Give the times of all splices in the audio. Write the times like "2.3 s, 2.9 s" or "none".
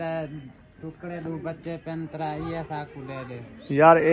none

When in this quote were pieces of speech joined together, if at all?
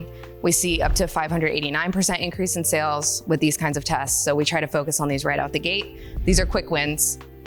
none

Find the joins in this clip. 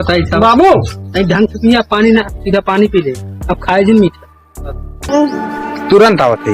5.0 s

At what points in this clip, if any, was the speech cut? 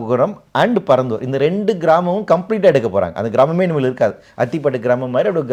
none

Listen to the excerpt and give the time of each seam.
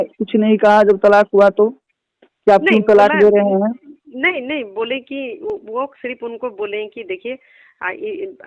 none

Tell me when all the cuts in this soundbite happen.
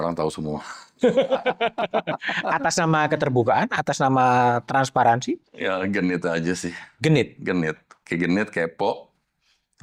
none

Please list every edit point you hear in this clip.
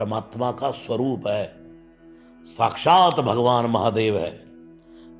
none

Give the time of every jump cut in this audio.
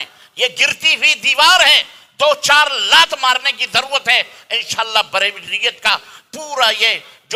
none

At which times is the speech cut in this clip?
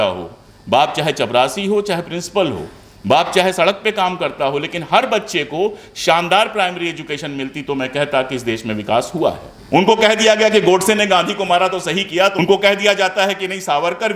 9.5 s, 12.3 s

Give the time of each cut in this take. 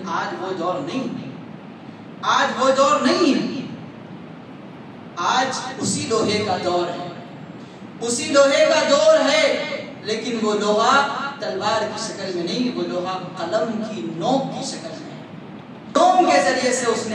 16.0 s

